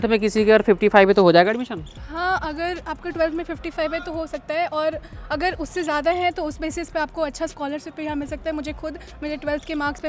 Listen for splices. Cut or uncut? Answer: uncut